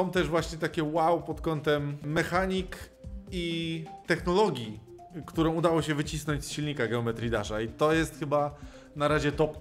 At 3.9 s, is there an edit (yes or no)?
yes